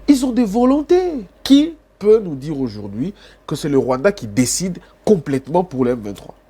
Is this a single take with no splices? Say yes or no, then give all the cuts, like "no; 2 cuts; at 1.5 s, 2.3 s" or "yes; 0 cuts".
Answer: no; 1 cut; at 1.3 s